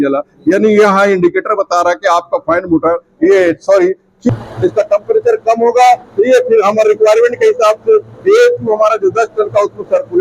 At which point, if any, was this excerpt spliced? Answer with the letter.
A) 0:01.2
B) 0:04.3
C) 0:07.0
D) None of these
B